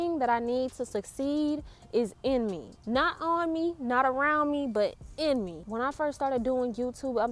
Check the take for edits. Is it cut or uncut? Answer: uncut